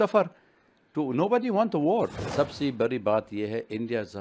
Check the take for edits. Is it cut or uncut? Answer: cut